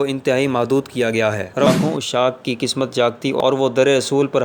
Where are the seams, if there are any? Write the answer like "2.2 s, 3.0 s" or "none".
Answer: 1.7 s, 3.4 s